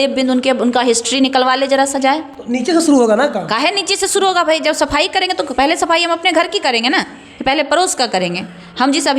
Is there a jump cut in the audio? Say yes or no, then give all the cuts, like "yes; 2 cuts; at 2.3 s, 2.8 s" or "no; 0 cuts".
no; 0 cuts